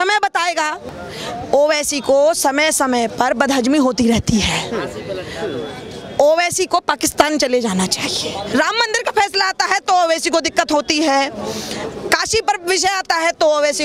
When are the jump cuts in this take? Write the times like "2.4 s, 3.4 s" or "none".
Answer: 0.8 s, 8.5 s